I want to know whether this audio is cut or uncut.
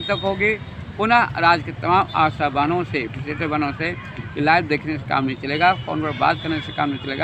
uncut